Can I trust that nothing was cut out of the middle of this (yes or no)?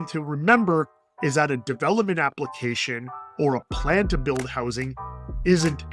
yes